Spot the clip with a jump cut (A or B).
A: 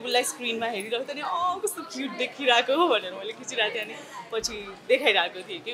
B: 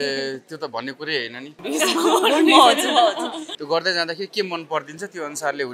B